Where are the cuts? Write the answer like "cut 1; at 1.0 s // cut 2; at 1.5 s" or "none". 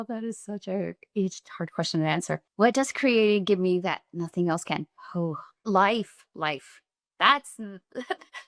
cut 1; at 2.5 s // cut 2; at 5.7 s